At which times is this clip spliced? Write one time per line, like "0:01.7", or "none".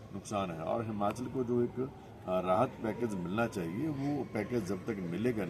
none